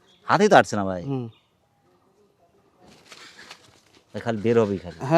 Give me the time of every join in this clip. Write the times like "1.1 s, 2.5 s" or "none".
none